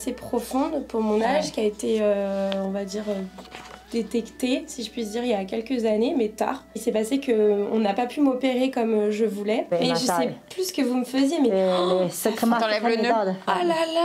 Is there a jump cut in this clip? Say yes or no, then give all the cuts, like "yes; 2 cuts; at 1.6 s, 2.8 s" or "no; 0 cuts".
yes; 2 cuts; at 6.7 s, 9.7 s